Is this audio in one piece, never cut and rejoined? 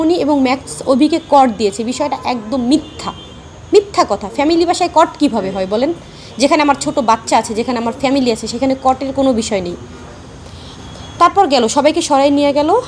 yes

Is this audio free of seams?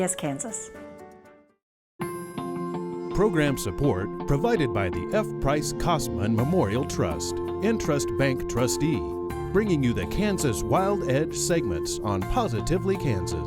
no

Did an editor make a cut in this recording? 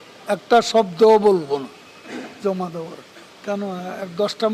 yes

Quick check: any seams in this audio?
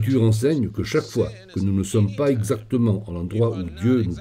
no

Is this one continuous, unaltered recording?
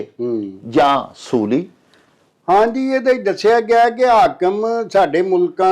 yes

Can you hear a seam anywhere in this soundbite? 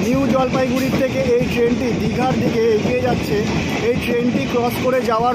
no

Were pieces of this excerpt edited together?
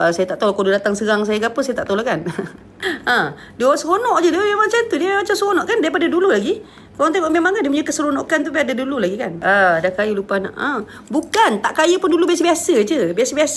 yes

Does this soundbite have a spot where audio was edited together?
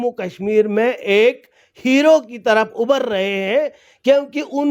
no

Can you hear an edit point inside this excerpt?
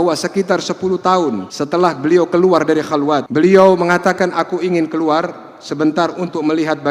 yes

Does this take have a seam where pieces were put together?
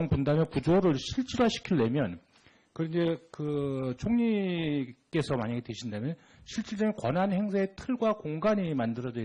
no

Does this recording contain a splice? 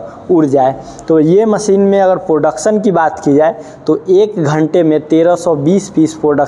no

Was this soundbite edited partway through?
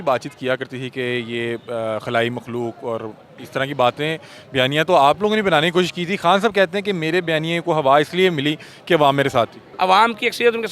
yes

